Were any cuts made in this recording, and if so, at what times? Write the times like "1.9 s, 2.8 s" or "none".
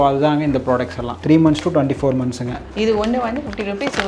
2.6 s